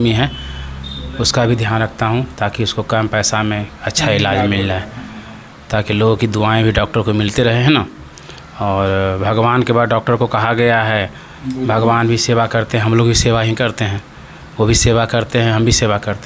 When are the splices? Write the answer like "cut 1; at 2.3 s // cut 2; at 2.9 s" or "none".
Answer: none